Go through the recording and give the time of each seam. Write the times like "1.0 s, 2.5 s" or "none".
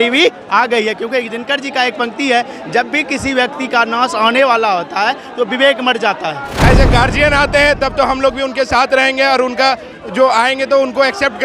6.5 s

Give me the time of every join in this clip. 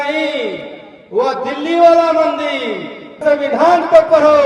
3.2 s

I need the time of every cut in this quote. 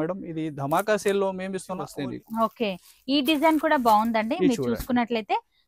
1.9 s

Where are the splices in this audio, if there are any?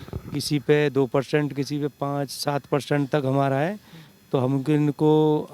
none

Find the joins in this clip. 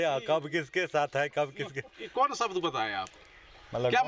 none

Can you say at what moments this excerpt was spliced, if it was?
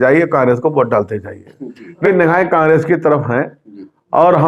2.0 s

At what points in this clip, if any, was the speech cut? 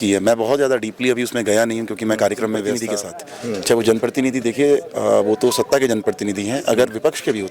2.8 s

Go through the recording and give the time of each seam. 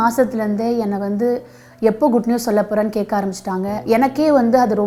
none

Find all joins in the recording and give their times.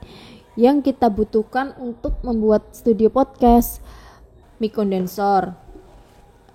4.4 s

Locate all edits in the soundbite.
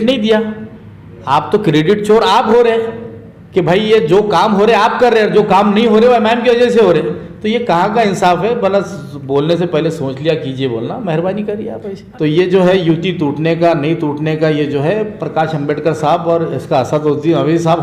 12.0 s

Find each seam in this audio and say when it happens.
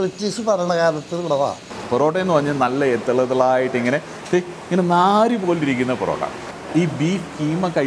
1.7 s, 6.4 s

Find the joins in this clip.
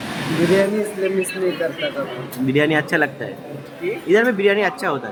none

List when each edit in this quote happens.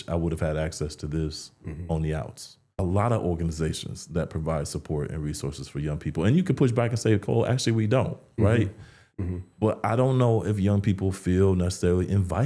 2.7 s

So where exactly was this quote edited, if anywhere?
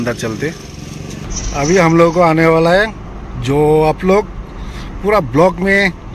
1.2 s

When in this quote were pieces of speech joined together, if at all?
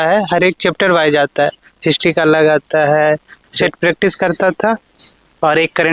3.4 s

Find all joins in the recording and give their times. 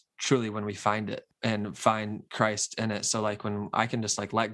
1.3 s

